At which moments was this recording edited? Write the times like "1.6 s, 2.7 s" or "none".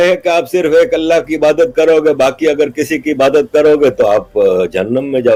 none